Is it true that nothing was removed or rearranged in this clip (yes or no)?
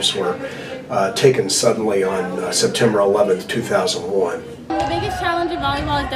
no